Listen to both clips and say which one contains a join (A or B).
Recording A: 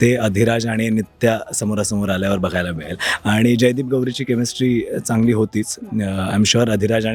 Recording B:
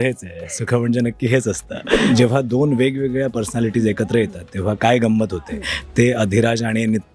B